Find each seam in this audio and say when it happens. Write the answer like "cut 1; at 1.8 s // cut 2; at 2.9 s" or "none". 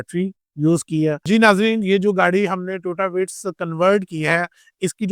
cut 1; at 1.2 s